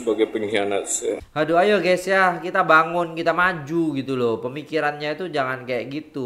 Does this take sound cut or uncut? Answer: cut